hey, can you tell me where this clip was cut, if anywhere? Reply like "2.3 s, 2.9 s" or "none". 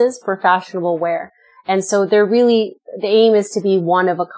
none

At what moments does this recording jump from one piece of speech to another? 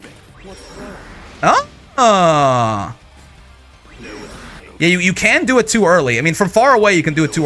none

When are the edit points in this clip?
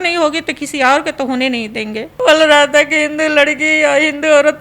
2.1 s

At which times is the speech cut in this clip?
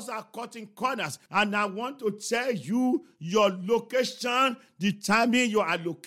1.2 s

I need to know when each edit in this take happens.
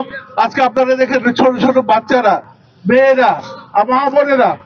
none

